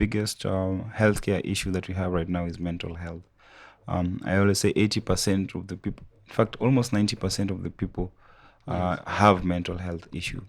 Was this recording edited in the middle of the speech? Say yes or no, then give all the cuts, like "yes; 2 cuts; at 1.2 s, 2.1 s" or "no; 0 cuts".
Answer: no; 0 cuts